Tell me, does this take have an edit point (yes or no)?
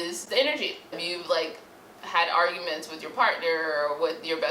yes